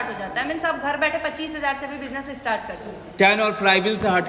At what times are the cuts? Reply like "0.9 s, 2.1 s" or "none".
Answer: 3.1 s